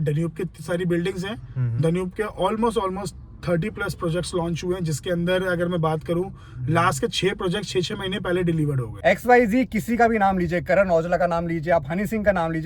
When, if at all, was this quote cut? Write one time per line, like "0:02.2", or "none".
0:09.0